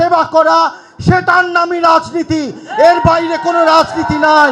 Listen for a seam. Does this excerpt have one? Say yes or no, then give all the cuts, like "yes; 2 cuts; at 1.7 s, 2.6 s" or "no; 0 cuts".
no; 0 cuts